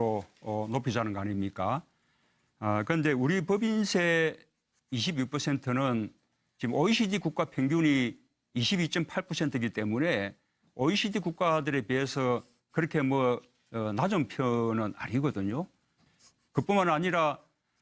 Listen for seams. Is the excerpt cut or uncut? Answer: uncut